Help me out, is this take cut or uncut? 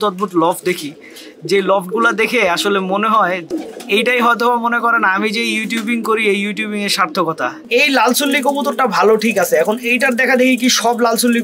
cut